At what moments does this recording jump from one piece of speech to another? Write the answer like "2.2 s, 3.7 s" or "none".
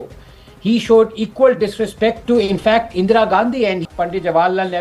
3.9 s

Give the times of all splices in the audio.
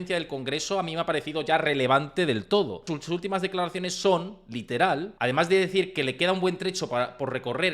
2.9 s, 5.1 s

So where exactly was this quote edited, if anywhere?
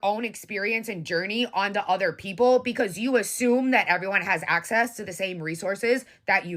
none

